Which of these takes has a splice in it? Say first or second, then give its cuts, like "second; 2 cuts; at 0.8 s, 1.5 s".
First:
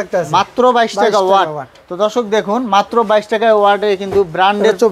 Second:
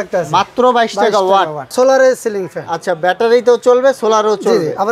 second; 1 cut; at 1.7 s